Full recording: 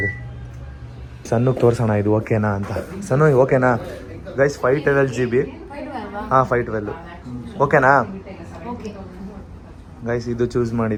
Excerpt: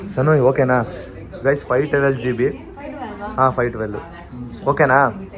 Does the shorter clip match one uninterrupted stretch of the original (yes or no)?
yes